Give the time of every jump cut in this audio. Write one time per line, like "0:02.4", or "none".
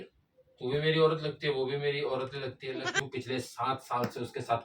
0:03.0